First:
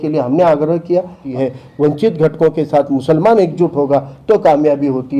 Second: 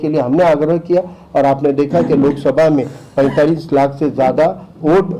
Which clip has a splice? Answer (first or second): first